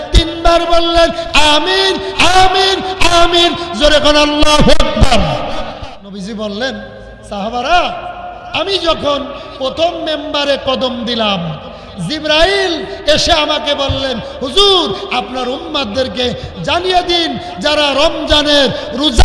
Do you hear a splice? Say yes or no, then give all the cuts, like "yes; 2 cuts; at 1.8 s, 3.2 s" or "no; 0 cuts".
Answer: yes; 1 cut; at 5.9 s